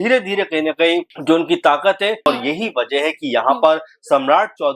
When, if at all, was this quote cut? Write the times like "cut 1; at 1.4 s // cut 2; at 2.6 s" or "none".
cut 1; at 1.1 s // cut 2; at 2.3 s